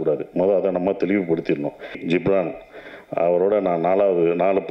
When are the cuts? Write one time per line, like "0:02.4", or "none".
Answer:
0:02.0